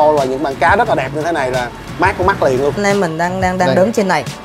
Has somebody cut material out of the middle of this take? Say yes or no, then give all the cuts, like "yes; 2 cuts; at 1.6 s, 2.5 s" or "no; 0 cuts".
yes; 1 cut; at 2.8 s